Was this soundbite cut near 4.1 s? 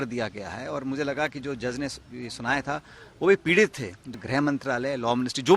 yes; 1 cut; at 4.1 s

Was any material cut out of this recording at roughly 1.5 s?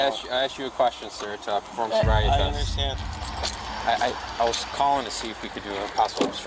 no; 1 cut; at 3.0 s

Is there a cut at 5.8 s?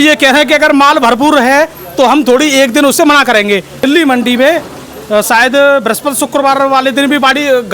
no; 1 cut; at 3.7 s

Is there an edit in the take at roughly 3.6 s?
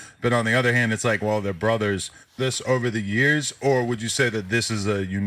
no; 1 cut; at 2.3 s

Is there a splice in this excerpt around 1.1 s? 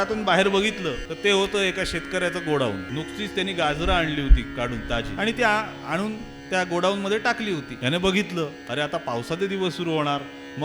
yes; 4 cuts; at 1.1 s, 2.9 s, 5.1 s, 7.7 s

